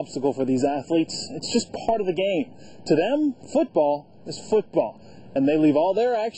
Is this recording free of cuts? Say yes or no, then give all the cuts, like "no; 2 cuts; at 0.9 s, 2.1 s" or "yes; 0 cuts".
yes; 0 cuts